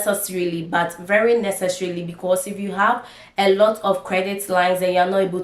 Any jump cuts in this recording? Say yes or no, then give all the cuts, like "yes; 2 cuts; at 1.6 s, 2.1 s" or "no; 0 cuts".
no; 0 cuts